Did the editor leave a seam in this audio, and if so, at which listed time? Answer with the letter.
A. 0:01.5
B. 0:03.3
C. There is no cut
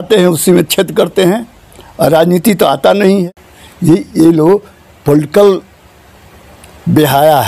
B